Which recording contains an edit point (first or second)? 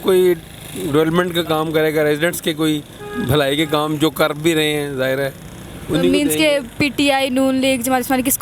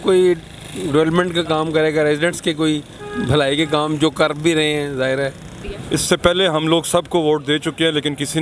second